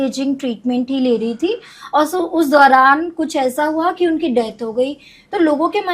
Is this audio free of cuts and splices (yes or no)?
yes